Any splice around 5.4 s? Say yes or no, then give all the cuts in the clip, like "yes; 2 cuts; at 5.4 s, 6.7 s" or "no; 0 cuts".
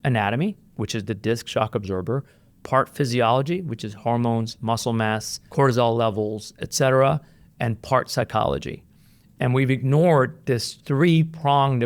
yes; 2 cuts; at 5.4 s, 10.8 s